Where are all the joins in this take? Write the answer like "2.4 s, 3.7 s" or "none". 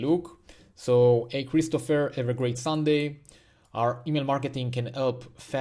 none